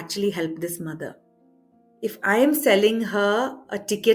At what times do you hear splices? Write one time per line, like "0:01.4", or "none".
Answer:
0:01.9